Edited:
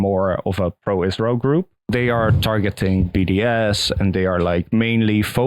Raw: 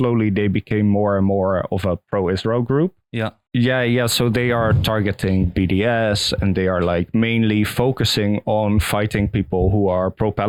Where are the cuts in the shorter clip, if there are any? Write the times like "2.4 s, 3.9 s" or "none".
1.9 s